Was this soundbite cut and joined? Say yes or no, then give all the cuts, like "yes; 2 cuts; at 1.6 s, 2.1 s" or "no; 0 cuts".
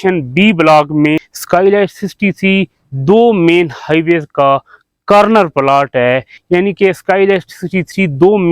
yes; 2 cuts; at 1.3 s, 6.3 s